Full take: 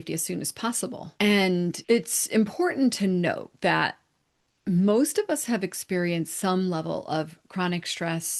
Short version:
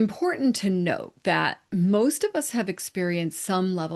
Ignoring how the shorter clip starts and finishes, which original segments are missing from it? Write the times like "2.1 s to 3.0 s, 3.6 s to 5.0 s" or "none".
4.0 s to 4.5 s